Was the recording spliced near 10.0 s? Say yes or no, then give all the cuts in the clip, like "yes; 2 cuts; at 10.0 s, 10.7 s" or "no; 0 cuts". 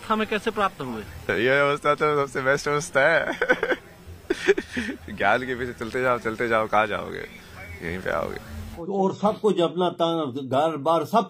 no; 1 cut; at 8.7 s